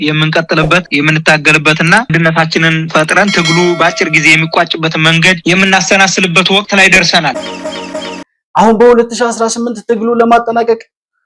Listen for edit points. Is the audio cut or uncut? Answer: cut